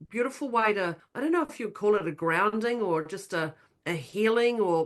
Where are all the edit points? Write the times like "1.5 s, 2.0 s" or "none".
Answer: 1.0 s